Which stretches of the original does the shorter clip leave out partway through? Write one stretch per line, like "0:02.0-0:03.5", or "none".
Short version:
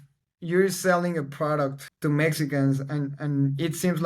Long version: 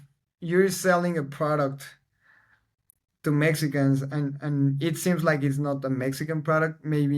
0:01.9-0:03.1